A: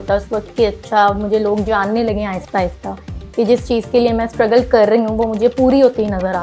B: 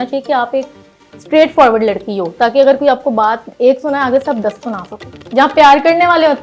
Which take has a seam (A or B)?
B